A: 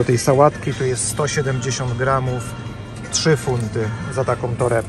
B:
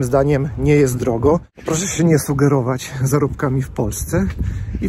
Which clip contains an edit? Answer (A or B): B